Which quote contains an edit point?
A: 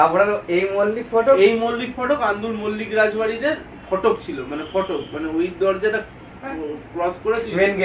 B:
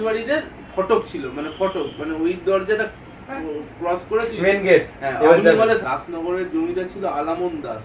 B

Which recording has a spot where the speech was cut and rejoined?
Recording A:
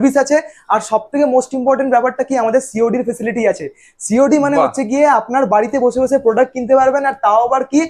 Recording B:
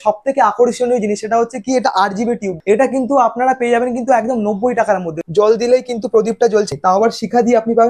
B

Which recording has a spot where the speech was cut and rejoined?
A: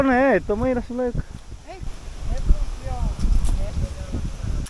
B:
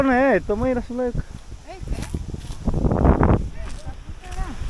A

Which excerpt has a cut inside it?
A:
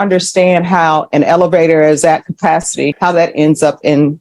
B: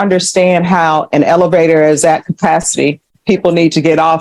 A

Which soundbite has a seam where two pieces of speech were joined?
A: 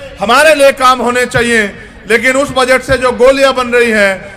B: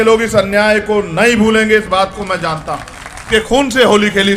B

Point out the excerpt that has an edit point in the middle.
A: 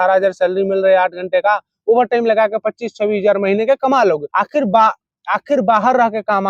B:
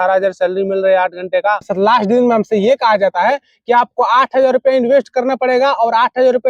B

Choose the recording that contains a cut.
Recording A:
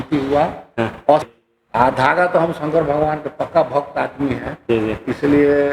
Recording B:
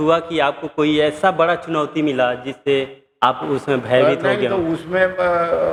A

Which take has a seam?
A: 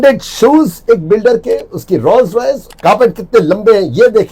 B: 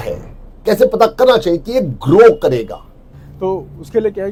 A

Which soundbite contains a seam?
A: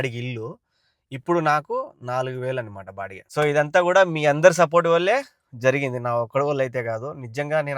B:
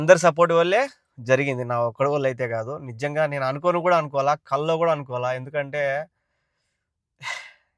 A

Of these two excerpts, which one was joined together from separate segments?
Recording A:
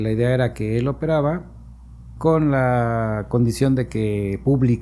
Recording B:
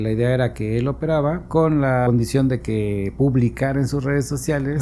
B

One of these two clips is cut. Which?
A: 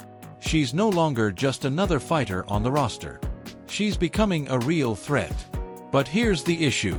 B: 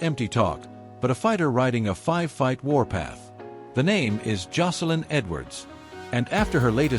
B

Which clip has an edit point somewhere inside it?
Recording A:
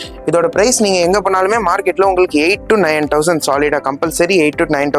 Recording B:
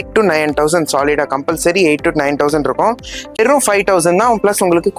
B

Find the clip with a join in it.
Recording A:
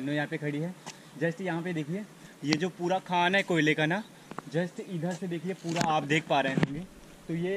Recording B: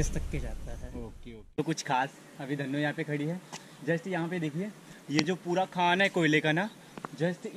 B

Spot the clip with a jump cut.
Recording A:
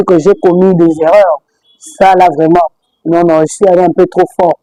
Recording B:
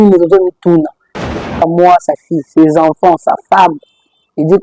B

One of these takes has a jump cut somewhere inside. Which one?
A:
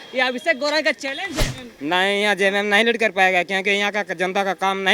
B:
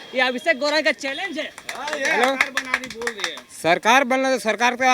A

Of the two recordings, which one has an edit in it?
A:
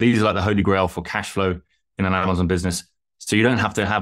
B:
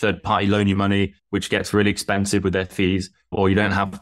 B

